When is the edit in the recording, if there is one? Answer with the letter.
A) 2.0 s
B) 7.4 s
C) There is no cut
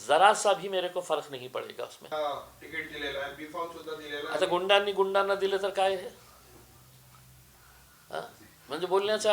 A